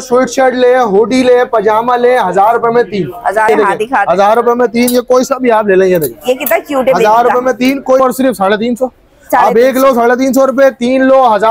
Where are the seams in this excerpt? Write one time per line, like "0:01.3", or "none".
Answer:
0:03.5
0:08.0